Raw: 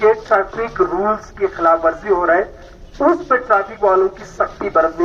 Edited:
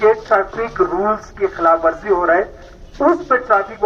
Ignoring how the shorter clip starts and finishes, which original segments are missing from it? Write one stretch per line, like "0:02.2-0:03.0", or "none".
none